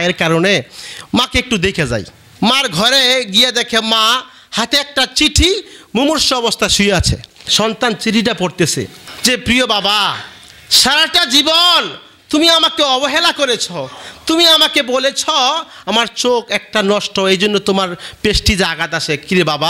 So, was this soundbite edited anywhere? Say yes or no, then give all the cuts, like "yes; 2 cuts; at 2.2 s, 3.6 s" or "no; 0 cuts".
yes; 1 cut; at 9.0 s